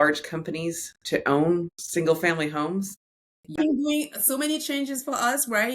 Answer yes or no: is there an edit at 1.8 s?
yes